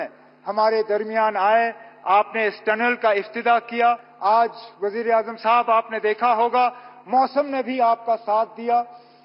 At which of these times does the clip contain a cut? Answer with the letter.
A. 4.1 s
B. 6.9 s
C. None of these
A